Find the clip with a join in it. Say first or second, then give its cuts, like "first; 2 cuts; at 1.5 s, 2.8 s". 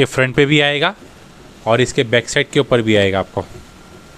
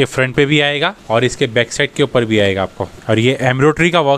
second; 2 cuts; at 1.0 s, 2.9 s